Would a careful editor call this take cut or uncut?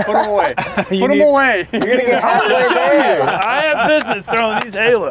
uncut